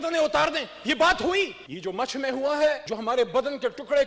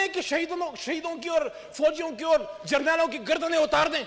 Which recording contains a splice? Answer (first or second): first